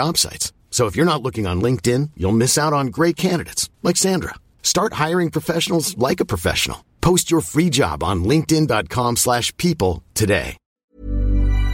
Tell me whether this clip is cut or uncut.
cut